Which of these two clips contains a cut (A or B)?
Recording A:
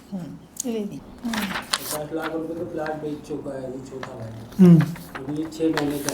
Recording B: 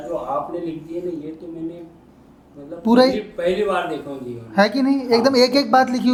A